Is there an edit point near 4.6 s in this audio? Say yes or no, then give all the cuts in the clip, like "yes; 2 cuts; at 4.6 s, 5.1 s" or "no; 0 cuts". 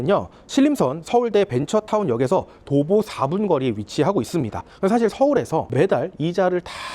yes; 1 cut; at 4.6 s